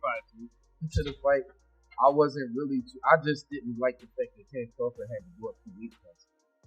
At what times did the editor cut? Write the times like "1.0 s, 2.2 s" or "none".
0.9 s